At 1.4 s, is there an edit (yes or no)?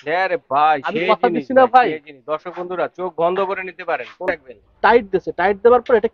no